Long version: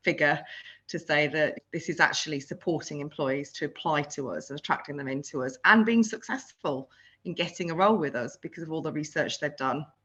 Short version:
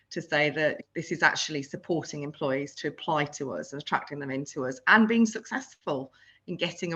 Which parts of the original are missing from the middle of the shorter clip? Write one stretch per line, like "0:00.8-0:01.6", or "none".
none